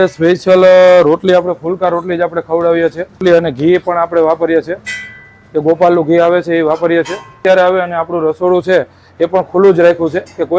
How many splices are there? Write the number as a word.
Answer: two